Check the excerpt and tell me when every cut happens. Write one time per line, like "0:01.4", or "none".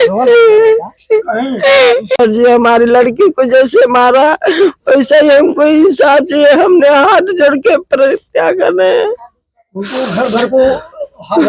0:02.2